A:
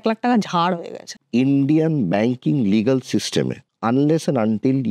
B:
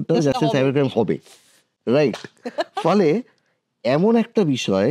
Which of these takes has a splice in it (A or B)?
A